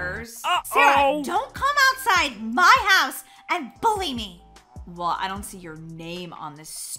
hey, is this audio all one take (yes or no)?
yes